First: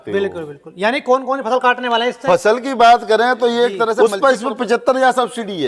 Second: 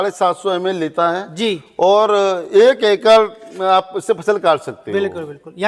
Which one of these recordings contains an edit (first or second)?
first